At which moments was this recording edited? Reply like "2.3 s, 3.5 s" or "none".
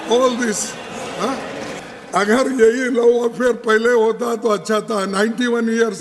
1.8 s